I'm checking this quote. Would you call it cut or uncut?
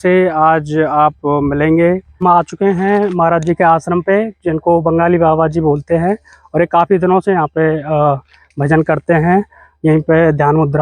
cut